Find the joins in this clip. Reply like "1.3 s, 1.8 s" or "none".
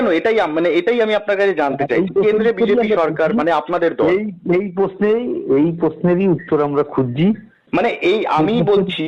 7.5 s